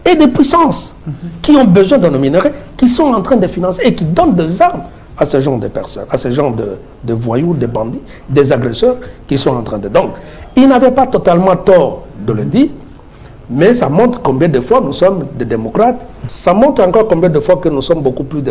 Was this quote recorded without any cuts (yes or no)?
no